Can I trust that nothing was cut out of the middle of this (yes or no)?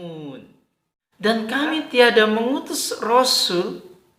yes